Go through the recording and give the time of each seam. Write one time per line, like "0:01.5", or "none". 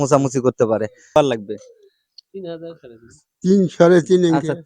0:01.2